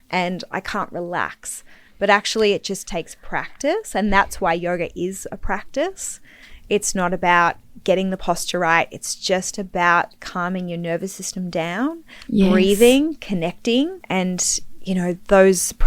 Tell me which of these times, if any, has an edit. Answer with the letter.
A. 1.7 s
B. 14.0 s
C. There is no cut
B